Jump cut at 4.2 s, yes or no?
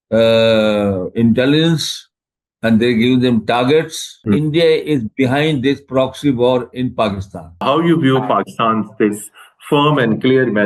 yes